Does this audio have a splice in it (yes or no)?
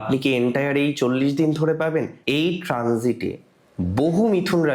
yes